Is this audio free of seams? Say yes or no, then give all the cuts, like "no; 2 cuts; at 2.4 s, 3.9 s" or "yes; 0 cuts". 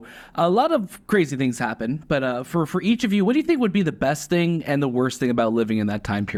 yes; 0 cuts